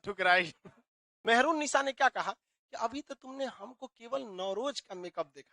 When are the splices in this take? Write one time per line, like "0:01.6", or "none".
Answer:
0:01.2